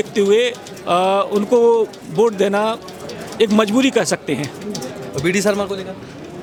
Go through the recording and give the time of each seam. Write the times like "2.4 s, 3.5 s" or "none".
none